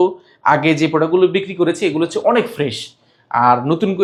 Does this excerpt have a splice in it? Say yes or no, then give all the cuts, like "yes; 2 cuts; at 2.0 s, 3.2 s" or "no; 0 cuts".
no; 0 cuts